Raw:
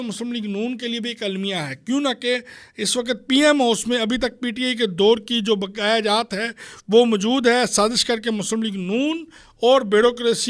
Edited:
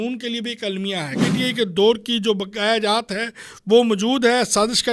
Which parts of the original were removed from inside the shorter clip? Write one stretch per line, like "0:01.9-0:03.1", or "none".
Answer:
0:01.8-0:04.4